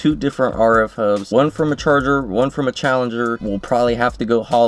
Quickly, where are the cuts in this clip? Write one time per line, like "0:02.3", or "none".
0:01.2
0:03.4

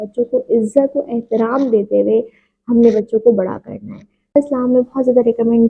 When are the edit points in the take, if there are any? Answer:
0:04.3

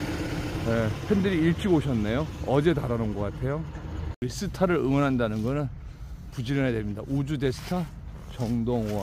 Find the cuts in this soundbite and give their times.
0:04.0

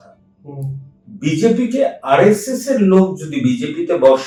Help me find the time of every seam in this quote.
none

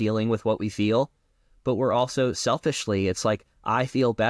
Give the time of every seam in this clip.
none

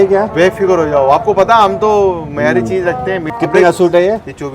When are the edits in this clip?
0:03.3

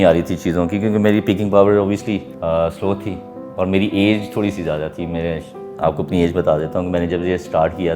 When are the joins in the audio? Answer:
0:02.3

